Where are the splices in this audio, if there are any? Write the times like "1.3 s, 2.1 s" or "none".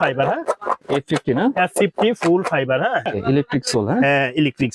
3.1 s